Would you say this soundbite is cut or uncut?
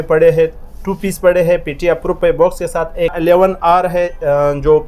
cut